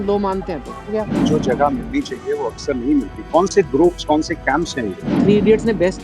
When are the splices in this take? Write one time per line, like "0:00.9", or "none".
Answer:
0:01.2
0:05.2